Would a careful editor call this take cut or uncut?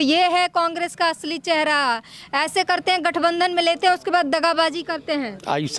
uncut